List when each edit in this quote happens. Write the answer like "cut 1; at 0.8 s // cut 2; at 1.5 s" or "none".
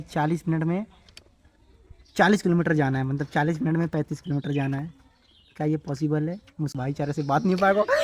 cut 1; at 6.8 s